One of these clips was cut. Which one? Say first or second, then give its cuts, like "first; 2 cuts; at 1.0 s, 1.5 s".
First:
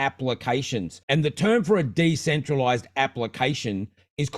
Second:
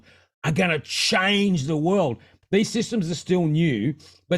second; 1 cut; at 2.3 s